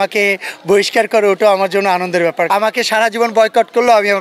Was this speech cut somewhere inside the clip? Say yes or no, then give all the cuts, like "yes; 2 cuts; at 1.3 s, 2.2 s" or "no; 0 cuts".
yes; 1 cut; at 2.5 s